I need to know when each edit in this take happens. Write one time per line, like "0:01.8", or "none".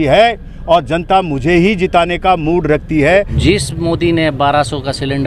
0:03.3